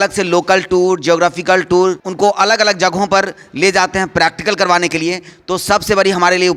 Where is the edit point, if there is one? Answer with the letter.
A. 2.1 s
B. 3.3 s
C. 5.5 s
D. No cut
A